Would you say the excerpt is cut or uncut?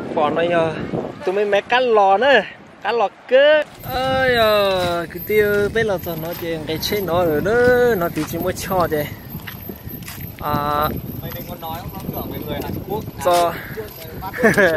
cut